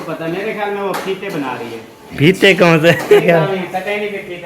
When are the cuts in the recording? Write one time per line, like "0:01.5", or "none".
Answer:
0:03.2